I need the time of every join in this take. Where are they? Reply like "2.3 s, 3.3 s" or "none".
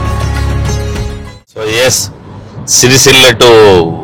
0.9 s